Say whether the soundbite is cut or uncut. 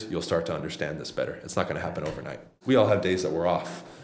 cut